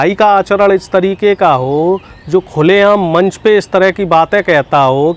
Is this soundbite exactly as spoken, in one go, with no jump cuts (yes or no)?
yes